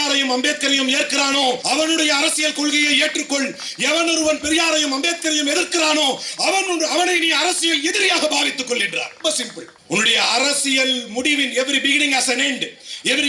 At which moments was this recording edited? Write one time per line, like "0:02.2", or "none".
0:01.6
0:09.2